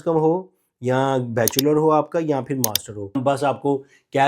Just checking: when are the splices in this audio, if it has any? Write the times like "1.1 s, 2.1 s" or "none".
3.2 s

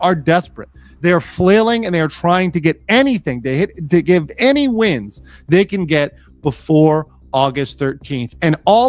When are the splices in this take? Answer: none

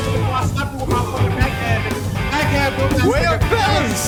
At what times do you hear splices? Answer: none

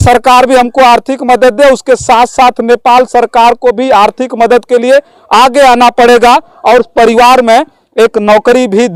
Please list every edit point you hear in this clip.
none

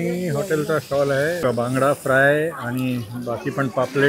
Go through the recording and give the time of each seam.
1.4 s

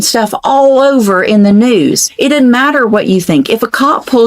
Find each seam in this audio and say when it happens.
2.1 s

